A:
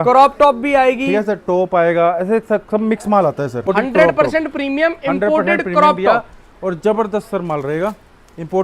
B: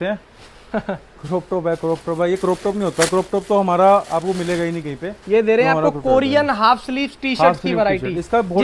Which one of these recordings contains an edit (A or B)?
A